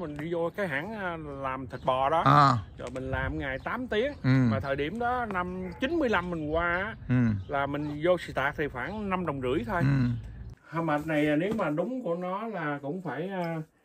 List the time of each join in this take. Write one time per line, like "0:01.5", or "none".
0:10.5